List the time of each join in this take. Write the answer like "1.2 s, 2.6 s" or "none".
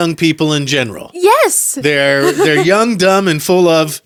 none